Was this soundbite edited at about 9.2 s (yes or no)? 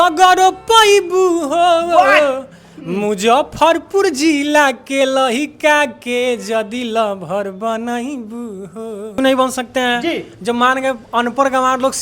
yes